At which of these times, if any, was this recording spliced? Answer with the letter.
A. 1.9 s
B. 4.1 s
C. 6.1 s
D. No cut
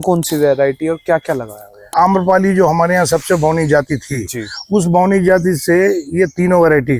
A